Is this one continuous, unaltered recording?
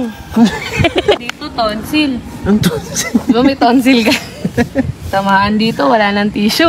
yes; 0 cuts

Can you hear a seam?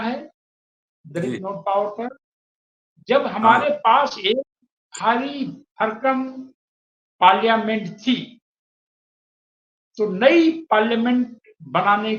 no; 0 cuts

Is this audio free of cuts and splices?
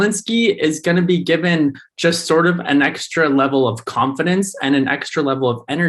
yes; 0 cuts

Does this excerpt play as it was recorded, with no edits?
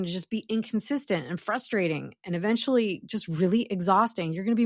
yes; 0 cuts

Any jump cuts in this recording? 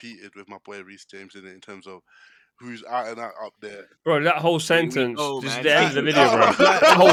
no; 0 cuts

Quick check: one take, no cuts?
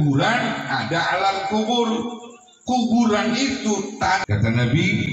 no; 1 cut; at 4.2 s

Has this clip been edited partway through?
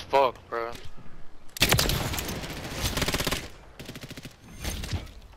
no; 0 cuts

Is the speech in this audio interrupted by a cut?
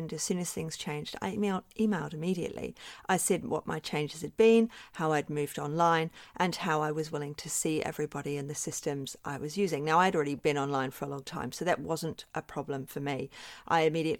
no; 0 cuts

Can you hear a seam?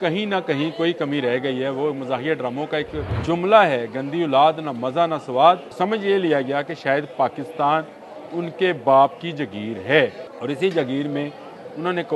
yes; 3 cuts; at 3.1 s, 5.7 s, 10.3 s

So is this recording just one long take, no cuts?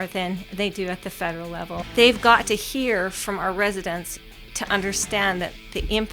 no; 1 cut; at 1.8 s

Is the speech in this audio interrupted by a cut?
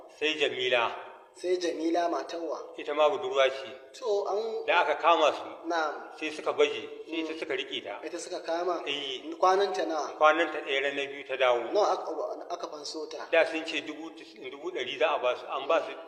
no; 0 cuts

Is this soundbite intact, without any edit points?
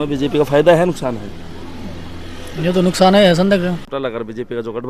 no; 1 cut; at 3.9 s

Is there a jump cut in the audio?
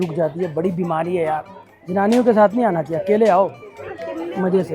no; 0 cuts

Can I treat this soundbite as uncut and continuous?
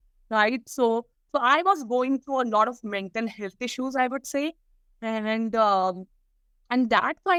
yes; 0 cuts

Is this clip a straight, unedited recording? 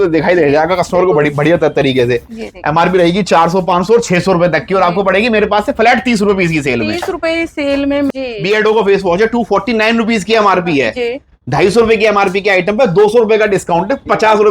no; 1 cut; at 8.1 s

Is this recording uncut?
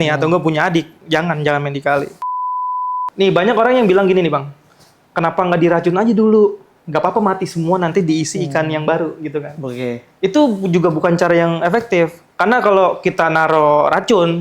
no; 1 cut; at 2.4 s

